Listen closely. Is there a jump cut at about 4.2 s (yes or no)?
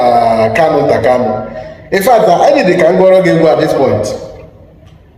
no